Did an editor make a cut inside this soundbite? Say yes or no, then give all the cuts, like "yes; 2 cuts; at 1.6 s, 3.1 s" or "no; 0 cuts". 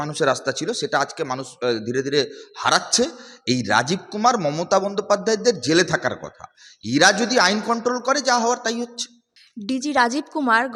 no; 0 cuts